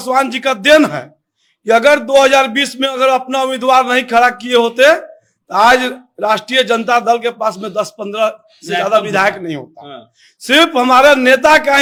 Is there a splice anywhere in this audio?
no; 0 cuts

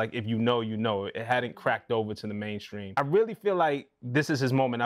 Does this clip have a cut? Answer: yes; 1 cut; at 2.8 s

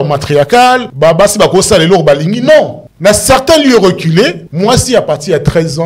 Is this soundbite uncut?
no; 3 cuts; at 0.9 s, 2.8 s, 4.4 s

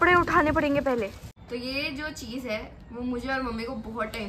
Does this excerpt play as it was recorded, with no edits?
no; 1 cut; at 1.2 s

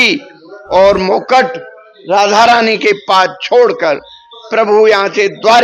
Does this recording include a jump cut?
no; 0 cuts

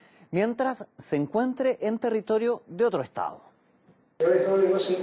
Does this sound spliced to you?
yes; 1 cut; at 2.1 s

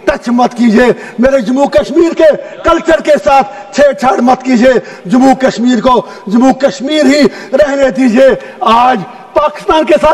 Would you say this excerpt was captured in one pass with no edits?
yes; 0 cuts

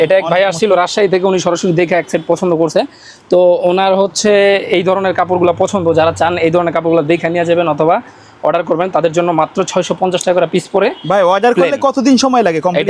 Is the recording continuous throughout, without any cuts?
yes; 0 cuts

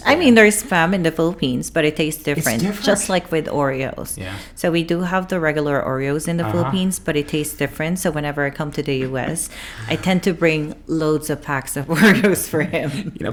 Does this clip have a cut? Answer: no; 0 cuts

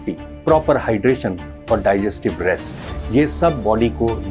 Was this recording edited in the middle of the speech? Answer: no; 0 cuts

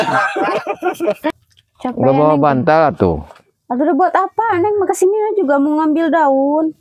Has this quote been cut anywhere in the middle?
yes; 1 cut; at 1.3 s

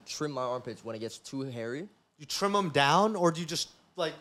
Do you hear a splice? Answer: no; 0 cuts

